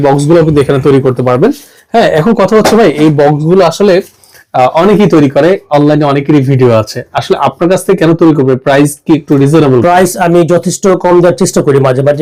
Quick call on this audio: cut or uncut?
uncut